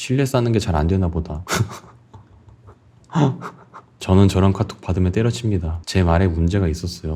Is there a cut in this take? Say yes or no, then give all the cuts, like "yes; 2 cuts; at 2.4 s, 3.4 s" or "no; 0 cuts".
no; 0 cuts